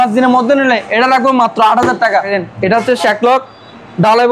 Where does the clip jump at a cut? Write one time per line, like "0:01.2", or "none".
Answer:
0:02.4